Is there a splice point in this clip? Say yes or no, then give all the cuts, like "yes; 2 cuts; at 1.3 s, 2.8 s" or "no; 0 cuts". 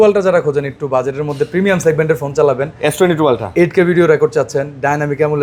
no; 0 cuts